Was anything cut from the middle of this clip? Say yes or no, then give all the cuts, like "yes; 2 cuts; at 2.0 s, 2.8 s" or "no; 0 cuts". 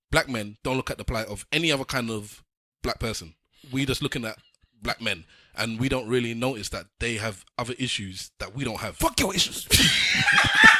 no; 0 cuts